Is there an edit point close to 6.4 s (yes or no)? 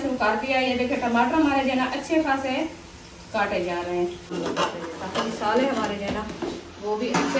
no